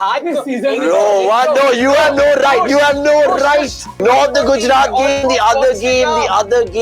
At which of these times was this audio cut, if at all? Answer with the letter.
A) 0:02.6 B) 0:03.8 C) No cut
B